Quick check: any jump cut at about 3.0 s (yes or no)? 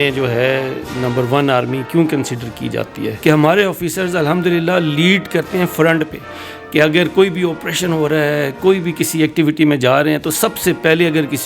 yes